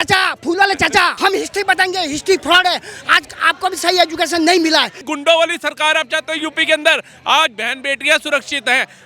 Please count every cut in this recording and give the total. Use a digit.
2